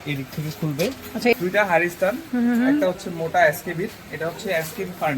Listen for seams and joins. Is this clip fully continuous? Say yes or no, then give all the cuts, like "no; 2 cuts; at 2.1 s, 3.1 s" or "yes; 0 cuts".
no; 1 cut; at 1.3 s